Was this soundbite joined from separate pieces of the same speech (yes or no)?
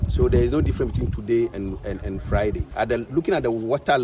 yes